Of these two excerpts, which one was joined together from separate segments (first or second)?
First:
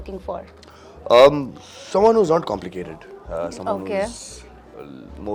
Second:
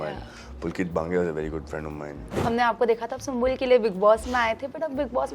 second